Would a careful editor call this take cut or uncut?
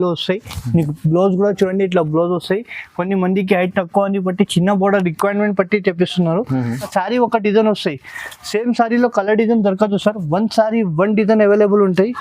cut